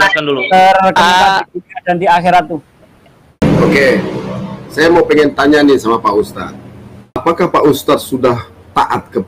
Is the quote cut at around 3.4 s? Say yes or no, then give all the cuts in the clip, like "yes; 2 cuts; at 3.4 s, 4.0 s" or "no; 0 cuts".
yes; 2 cuts; at 3.4 s, 7.2 s